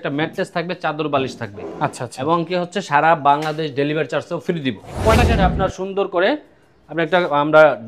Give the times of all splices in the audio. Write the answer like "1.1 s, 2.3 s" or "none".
5.3 s